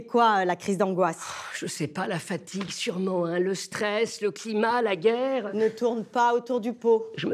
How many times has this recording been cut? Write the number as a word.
one